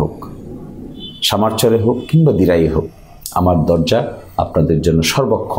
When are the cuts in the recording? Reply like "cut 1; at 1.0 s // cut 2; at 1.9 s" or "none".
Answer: none

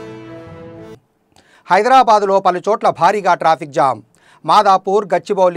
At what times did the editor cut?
cut 1; at 1.0 s

